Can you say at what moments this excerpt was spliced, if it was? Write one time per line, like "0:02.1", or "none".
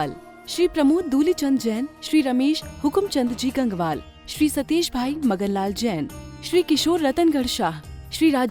none